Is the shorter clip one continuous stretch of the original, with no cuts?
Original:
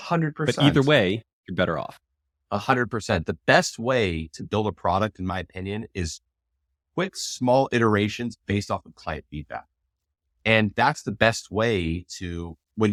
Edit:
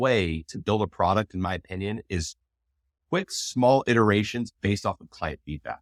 yes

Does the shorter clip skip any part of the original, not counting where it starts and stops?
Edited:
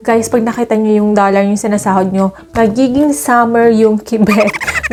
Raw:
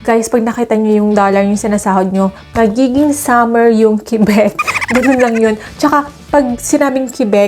no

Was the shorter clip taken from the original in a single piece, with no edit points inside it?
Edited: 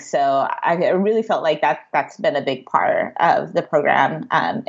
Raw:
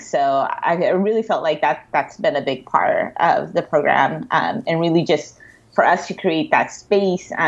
yes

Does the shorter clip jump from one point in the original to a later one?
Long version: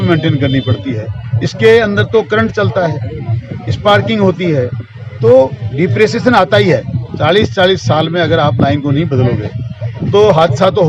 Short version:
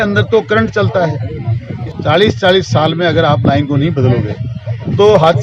yes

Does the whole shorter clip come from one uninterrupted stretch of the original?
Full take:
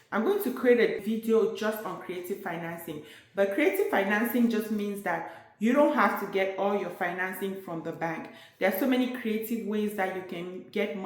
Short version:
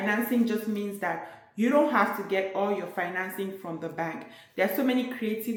yes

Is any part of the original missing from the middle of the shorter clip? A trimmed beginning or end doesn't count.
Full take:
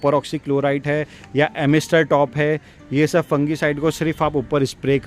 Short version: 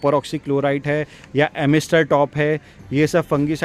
no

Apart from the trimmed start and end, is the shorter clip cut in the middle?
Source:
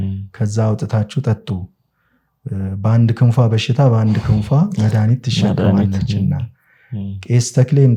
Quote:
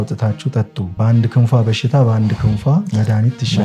yes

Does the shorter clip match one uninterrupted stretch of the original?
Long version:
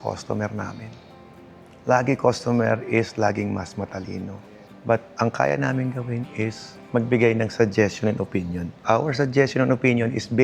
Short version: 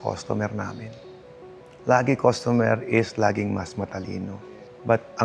yes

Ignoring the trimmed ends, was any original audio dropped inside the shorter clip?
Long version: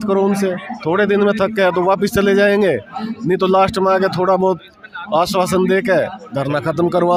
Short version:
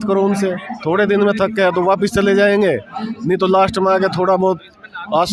no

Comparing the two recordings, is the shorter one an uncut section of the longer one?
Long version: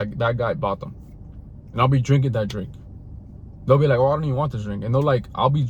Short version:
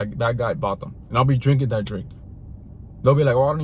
no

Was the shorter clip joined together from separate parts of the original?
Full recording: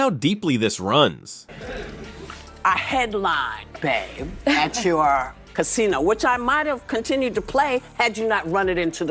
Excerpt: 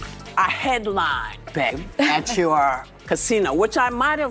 yes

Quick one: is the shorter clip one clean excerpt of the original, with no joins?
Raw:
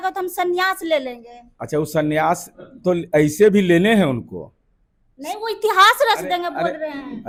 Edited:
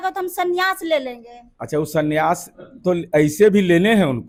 yes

